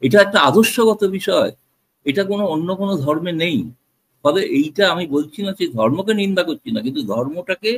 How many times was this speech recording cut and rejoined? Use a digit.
0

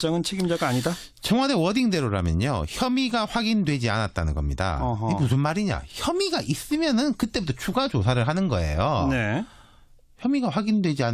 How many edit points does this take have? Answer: 1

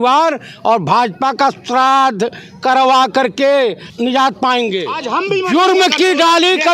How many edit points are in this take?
2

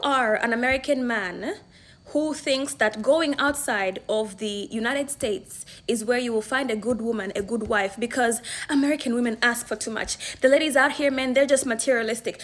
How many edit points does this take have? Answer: 0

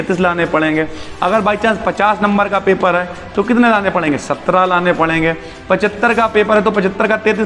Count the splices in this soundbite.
0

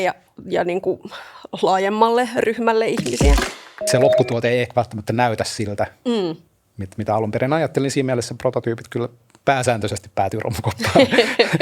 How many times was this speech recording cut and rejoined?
1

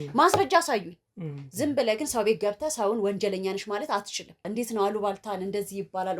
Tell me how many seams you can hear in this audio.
1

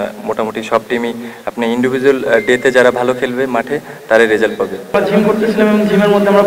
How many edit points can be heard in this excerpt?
1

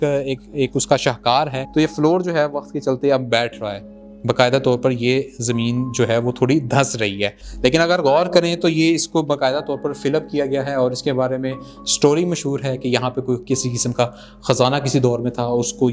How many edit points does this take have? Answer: 2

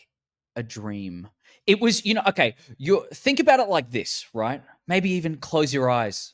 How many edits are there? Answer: 0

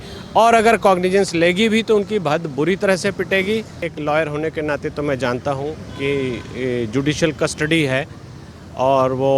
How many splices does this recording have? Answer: 1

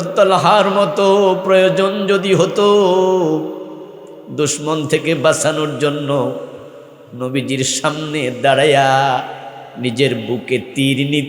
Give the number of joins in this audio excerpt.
0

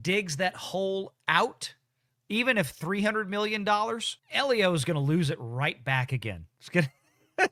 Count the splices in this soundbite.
0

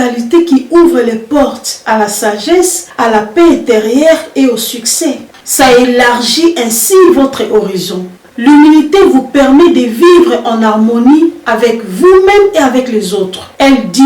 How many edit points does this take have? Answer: 2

